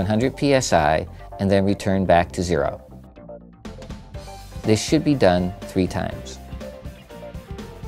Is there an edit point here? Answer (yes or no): yes